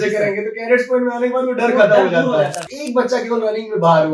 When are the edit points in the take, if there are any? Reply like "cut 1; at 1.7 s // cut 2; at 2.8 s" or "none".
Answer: cut 1; at 2.7 s